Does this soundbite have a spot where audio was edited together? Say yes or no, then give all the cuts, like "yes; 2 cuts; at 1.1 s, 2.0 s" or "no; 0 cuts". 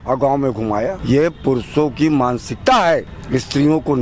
yes; 2 cuts; at 1.0 s, 3.2 s